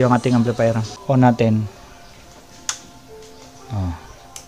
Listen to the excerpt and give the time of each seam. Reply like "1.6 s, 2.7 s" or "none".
0.9 s